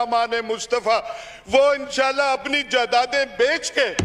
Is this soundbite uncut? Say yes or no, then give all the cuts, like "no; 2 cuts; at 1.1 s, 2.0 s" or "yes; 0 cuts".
yes; 0 cuts